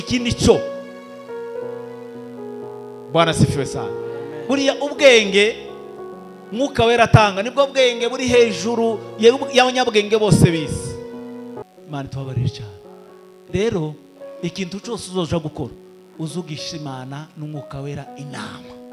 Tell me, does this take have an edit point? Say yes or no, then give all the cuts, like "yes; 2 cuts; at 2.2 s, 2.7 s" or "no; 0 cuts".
yes; 1 cut; at 11.6 s